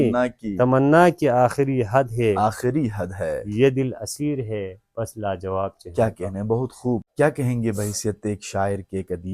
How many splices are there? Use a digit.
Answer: 1